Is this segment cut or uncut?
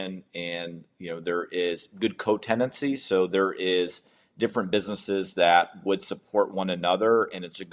uncut